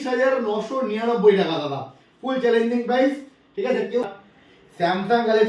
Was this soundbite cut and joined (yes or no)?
yes